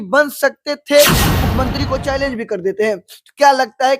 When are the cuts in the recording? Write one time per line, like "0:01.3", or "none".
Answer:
0:01.2